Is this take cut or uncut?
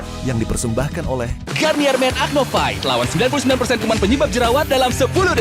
cut